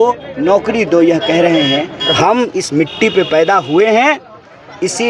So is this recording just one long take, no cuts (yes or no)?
no